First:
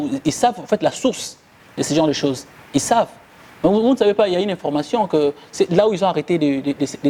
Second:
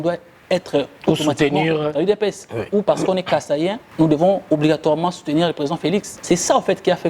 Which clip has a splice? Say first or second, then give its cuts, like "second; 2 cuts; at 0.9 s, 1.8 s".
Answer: second; 2 cuts; at 3.8 s, 6.1 s